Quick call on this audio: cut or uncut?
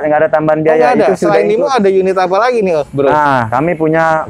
cut